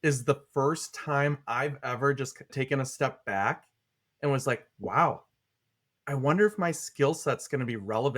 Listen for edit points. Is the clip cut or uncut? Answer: cut